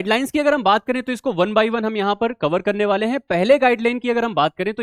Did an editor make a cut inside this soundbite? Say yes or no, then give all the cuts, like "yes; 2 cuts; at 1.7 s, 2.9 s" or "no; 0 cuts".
no; 0 cuts